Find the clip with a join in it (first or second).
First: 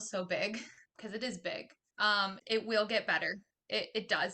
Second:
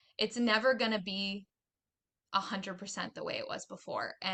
first